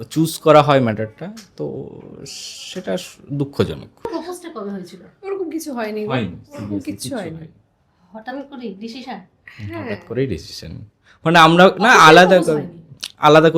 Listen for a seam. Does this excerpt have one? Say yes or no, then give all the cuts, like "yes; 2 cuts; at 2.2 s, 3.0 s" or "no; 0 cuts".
yes; 1 cut; at 4.0 s